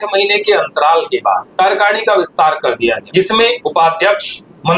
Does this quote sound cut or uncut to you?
cut